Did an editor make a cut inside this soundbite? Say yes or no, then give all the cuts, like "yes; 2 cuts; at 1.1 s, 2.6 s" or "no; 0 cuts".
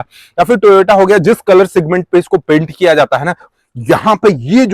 yes; 1 cut; at 3.4 s